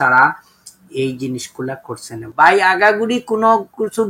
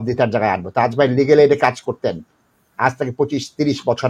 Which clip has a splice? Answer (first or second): first